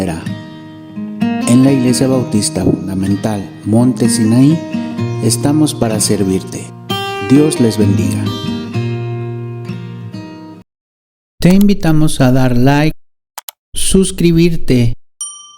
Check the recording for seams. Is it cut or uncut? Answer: cut